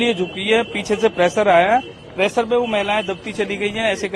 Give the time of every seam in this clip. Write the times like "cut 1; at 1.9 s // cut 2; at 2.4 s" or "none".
none